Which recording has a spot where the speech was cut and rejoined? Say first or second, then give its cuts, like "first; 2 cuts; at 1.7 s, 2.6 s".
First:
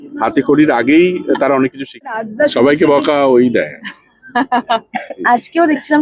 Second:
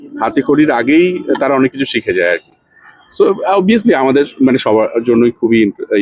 first; 1 cut; at 2.1 s